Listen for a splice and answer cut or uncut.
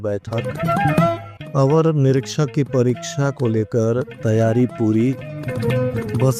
cut